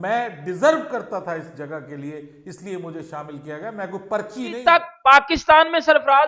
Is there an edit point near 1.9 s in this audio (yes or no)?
no